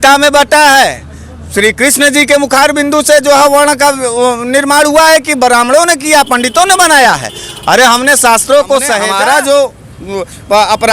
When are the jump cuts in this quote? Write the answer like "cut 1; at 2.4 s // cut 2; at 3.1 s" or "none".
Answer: cut 1; at 9.1 s